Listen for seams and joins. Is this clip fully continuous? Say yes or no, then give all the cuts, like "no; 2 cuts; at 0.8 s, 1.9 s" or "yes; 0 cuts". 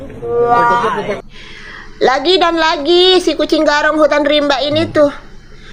yes; 0 cuts